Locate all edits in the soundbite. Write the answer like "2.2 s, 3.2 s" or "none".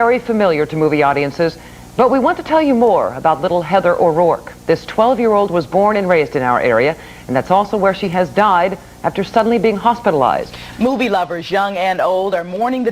10.6 s